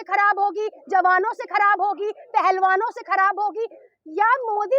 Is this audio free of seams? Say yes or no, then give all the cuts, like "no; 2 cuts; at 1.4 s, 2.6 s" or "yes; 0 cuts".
yes; 0 cuts